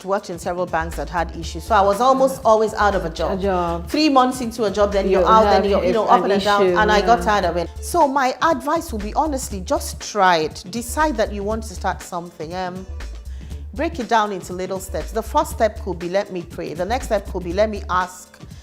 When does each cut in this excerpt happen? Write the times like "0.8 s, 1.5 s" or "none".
7.7 s

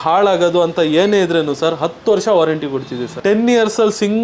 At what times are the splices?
none

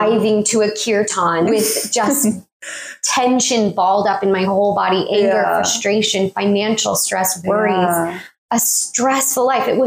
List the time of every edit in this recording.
none

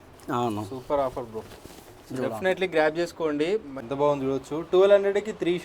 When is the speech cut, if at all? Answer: 3.8 s

